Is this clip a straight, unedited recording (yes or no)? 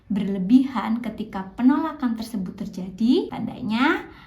no